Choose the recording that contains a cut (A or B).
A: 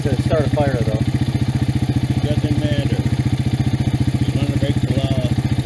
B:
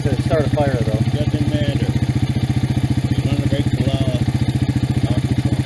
B